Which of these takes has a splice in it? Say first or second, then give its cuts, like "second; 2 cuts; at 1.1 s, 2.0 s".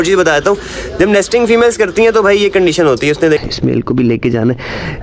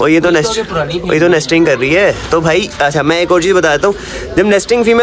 first; 1 cut; at 3.4 s